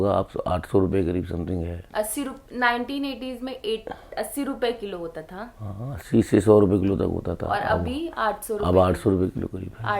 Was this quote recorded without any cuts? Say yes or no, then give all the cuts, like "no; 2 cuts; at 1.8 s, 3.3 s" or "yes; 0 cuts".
no; 1 cut; at 1.8 s